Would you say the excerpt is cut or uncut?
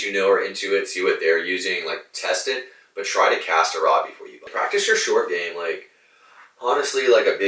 cut